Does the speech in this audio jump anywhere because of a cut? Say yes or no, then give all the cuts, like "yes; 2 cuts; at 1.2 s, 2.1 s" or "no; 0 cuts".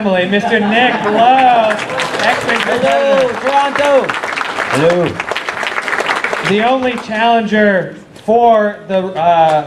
yes; 1 cut; at 2.0 s